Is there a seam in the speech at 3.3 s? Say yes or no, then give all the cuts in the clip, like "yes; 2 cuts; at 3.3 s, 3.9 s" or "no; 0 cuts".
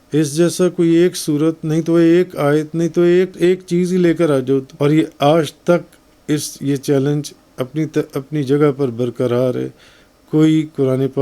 yes; 2 cuts; at 3.3 s, 4.7 s